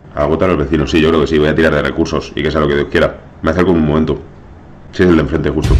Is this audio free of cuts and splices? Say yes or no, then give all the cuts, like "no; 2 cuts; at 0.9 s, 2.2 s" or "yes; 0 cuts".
yes; 0 cuts